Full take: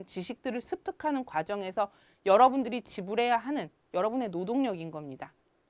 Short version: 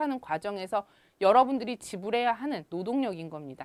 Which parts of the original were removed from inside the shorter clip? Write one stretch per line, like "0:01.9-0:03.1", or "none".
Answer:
0:03.7-0:04.3